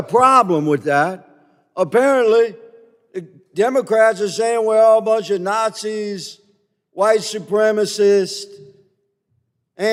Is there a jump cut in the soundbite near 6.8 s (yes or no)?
no